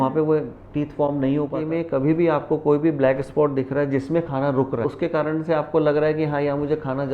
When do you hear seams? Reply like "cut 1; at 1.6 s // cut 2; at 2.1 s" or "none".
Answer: cut 1; at 1.6 s